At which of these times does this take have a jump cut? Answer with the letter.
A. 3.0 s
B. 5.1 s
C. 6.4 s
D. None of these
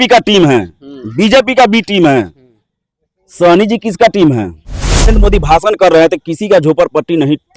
B